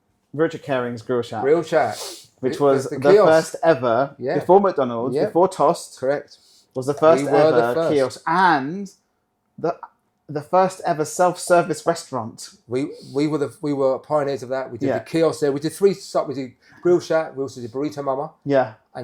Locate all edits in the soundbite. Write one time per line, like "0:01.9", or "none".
none